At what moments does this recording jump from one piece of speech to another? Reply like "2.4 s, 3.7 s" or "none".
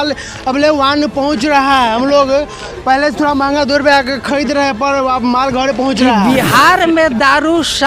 6.1 s